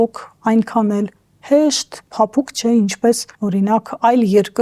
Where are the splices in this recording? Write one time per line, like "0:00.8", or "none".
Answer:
0:03.3